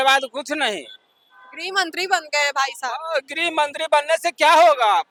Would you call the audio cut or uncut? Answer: uncut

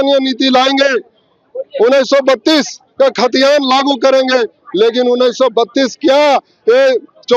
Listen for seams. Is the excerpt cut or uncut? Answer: uncut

